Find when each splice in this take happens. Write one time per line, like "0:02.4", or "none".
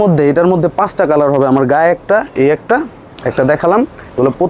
none